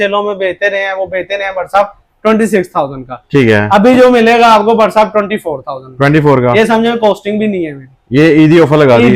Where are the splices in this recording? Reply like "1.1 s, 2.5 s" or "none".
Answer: none

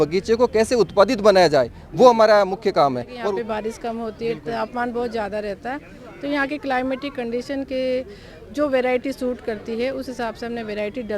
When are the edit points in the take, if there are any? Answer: 3.1 s

